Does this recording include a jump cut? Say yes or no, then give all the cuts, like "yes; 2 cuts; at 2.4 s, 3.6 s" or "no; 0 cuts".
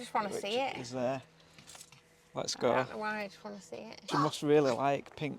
yes; 1 cut; at 4.1 s